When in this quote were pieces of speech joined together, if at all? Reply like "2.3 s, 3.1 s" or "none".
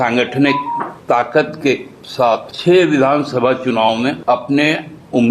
0.9 s, 2.5 s, 4.2 s